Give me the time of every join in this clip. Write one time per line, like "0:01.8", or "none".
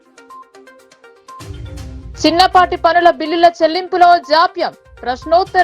none